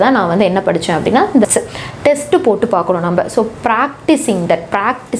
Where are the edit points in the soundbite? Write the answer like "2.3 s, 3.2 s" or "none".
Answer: 1.4 s